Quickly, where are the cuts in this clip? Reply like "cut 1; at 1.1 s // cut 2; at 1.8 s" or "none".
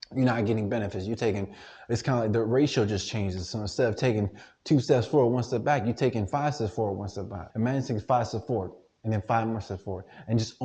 cut 1; at 7.4 s